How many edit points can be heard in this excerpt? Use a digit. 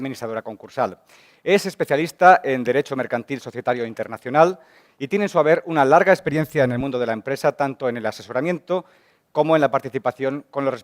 1